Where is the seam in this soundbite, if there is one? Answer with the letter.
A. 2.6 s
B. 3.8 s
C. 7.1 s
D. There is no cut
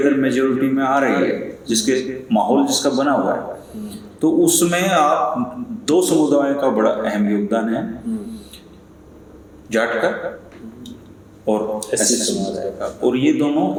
D